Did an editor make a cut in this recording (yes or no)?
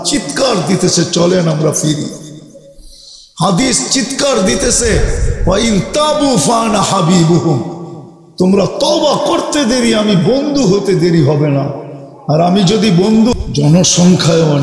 yes